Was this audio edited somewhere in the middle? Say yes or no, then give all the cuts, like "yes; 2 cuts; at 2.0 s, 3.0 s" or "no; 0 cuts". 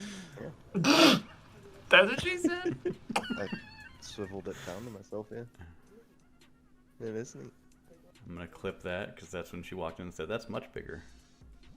no; 0 cuts